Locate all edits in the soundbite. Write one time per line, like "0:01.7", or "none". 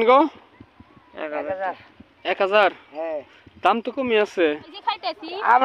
0:04.7

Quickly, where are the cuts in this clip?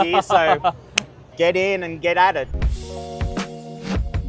0:02.6

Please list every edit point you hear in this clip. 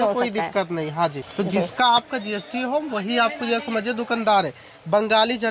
0:01.1

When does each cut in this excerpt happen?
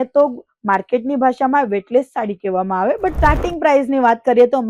0:03.1

